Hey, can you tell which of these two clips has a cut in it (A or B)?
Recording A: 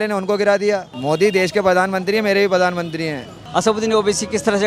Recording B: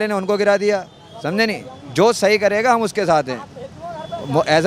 A